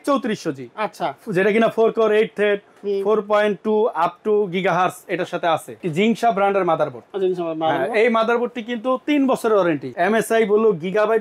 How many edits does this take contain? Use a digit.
2